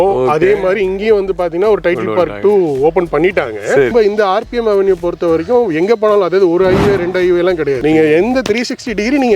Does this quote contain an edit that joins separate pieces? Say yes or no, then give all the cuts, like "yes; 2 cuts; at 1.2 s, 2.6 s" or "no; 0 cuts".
yes; 2 cuts; at 3.9 s, 7.8 s